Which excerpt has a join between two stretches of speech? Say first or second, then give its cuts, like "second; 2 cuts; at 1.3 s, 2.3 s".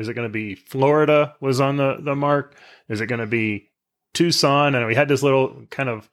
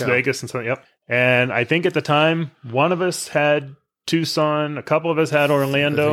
second; 1 cut; at 0.9 s